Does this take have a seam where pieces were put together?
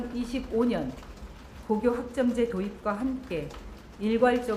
no; 0 cuts

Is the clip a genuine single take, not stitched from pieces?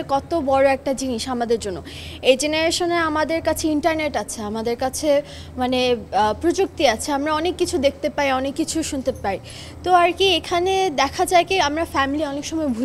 yes; 0 cuts

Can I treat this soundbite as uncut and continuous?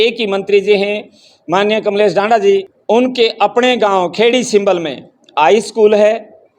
no; 1 cut; at 2.7 s

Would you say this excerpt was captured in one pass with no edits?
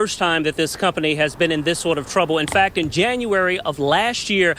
yes; 0 cuts

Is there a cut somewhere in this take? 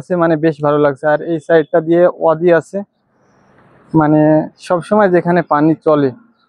no; 0 cuts

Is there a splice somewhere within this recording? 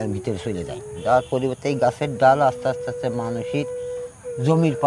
no; 0 cuts

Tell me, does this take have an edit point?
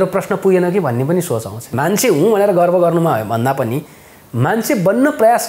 yes; 1 cut; at 1.7 s

